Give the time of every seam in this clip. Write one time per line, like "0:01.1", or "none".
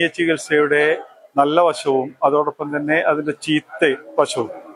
none